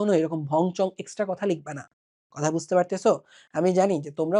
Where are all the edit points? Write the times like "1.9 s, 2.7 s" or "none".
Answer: none